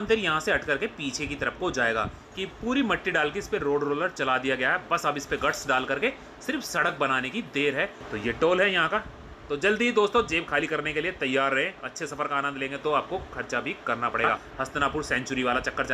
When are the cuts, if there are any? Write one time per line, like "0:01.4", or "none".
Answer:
0:02.2
0:08.0
0:14.5